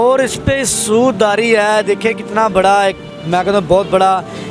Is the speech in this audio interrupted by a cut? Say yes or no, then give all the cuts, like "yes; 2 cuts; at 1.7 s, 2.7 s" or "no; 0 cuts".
no; 0 cuts